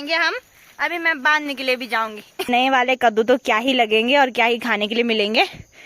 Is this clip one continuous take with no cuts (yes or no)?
no